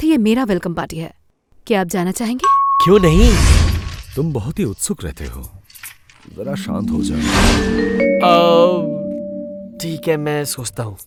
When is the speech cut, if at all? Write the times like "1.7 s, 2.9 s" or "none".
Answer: none